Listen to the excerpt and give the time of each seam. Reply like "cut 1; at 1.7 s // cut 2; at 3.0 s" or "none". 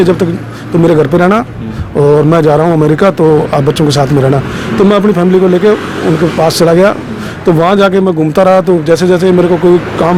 none